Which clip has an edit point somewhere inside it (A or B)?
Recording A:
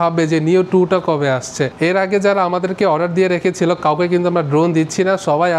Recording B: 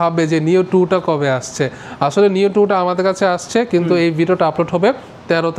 A